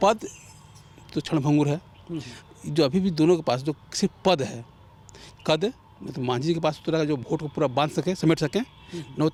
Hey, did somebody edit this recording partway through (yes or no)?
no